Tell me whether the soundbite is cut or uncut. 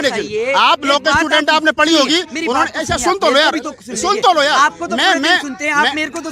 uncut